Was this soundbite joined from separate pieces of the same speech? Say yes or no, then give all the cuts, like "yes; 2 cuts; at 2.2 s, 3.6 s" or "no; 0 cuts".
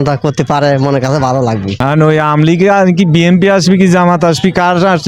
yes; 1 cut; at 1.7 s